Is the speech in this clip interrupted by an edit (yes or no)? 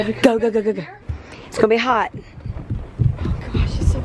yes